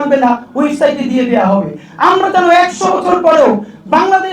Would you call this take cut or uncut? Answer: uncut